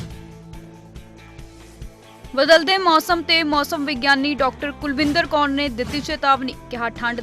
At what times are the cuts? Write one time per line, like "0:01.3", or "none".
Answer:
0:02.2